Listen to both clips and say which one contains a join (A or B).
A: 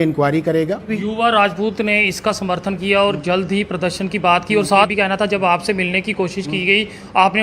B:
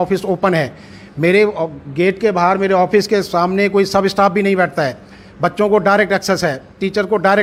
A